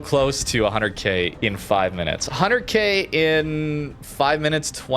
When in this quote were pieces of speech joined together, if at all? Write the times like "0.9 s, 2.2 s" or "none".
1.3 s